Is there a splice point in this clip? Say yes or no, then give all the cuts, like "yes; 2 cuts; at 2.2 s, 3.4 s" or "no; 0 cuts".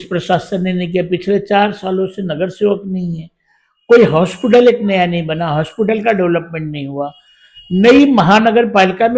no; 0 cuts